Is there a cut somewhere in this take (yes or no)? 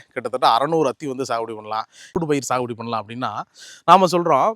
yes